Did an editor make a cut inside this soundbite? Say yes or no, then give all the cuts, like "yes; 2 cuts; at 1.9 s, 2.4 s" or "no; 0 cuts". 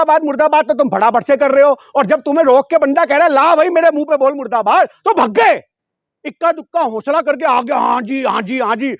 no; 0 cuts